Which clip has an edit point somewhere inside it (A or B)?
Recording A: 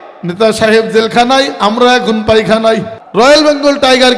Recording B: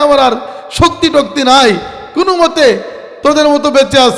A